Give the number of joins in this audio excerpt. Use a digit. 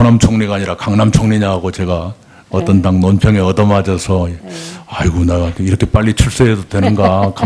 1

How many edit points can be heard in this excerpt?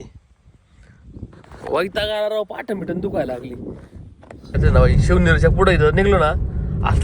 1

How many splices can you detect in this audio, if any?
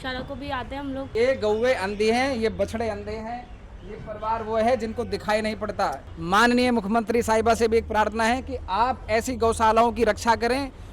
2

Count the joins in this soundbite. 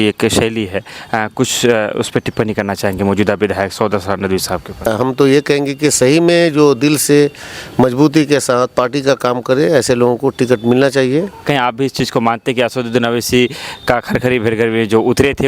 2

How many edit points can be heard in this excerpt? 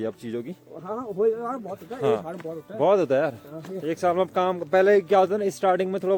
0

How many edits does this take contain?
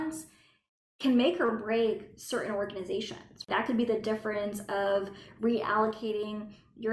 1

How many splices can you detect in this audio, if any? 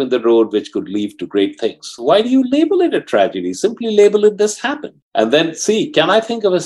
1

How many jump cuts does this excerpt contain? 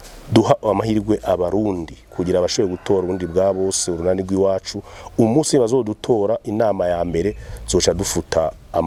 0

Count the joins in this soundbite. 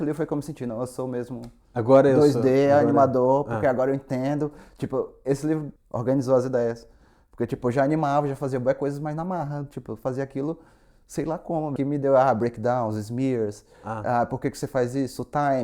2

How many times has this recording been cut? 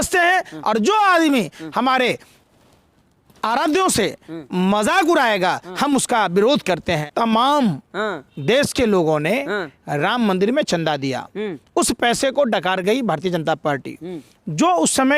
1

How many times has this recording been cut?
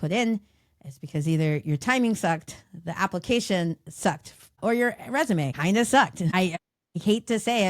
3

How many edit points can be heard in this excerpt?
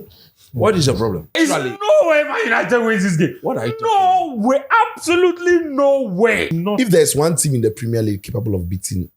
2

